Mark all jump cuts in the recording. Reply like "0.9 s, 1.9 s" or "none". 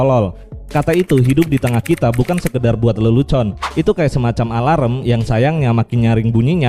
none

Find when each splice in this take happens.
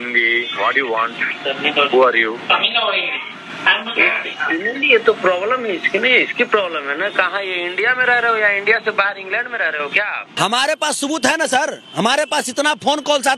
10.3 s

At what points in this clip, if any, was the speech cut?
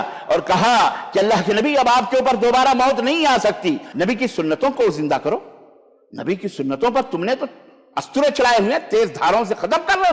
3.9 s

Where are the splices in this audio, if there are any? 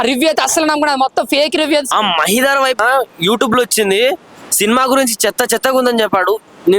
1.9 s, 2.8 s

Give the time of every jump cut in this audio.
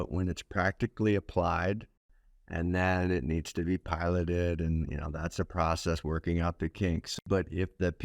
2.0 s, 7.1 s

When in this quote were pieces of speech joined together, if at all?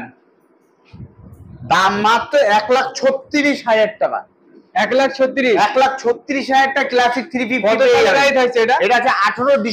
none

